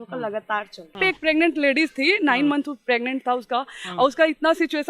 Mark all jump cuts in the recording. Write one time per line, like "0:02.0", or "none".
0:01.0